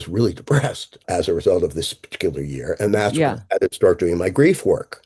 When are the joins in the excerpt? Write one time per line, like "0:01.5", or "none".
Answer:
none